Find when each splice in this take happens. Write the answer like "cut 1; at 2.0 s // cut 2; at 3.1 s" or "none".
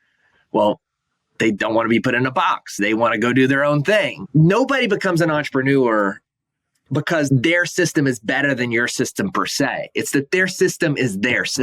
cut 1; at 2.8 s // cut 2; at 4.2 s // cut 3; at 7.3 s